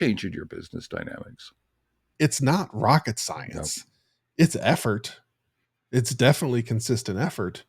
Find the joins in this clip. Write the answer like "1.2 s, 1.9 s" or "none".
2.1 s